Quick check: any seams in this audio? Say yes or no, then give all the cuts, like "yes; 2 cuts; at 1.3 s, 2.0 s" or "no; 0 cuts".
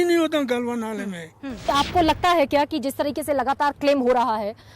yes; 1 cut; at 1.7 s